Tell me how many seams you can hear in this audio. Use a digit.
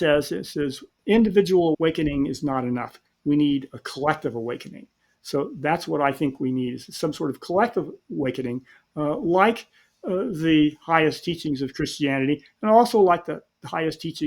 2